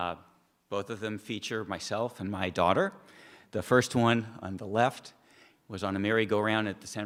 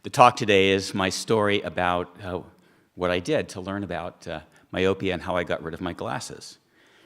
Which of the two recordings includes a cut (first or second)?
second